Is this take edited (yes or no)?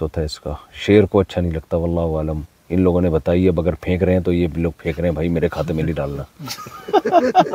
no